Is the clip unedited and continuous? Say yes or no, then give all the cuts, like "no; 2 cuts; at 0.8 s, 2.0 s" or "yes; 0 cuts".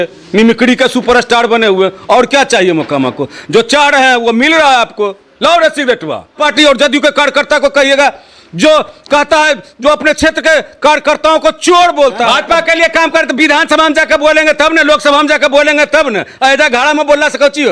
no; 2 cuts; at 6.4 s, 12.2 s